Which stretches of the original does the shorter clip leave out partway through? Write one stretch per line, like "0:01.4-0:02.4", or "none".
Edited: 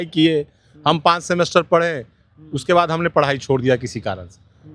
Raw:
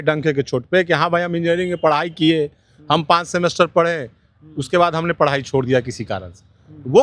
none